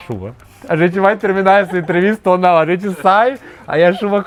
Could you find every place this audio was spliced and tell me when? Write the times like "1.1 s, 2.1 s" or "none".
none

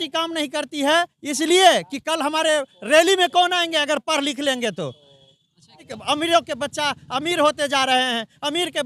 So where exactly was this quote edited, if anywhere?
5.9 s

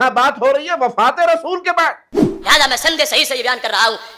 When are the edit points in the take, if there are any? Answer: 2.3 s

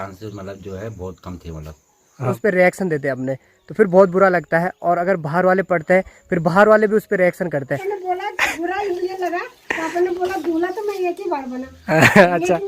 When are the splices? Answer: 2.4 s, 8.1 s

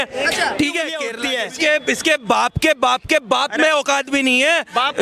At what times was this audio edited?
1.1 s

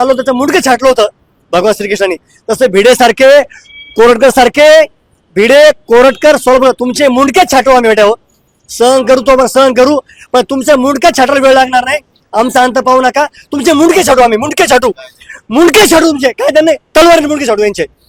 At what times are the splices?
none

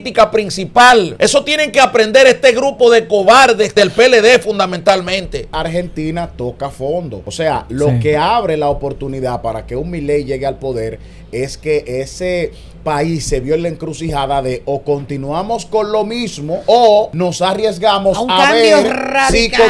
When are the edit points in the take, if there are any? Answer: 1.1 s, 3.7 s, 5.5 s, 7.2 s, 16.6 s, 17.1 s

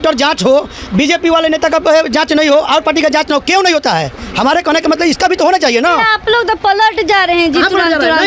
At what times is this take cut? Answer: none

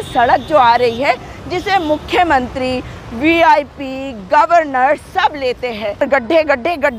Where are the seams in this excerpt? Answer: 6.0 s

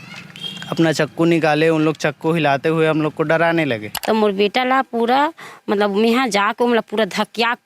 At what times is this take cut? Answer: 3.9 s

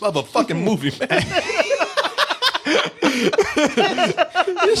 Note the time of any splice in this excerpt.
none

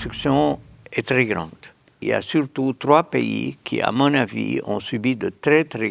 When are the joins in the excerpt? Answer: 2.0 s

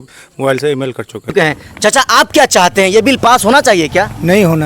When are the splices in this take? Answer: 1.3 s

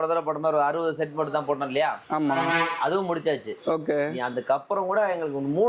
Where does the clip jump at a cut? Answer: none

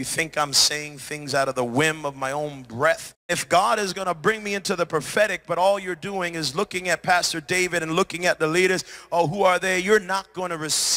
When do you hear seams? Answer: 3.3 s

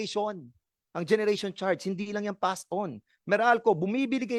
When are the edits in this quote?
none

